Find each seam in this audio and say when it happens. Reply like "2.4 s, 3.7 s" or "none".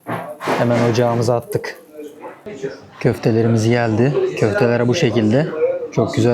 2.5 s